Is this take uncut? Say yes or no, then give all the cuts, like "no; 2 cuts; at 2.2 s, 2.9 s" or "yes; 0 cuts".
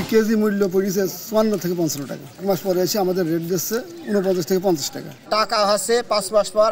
no; 2 cuts; at 2.4 s, 5.1 s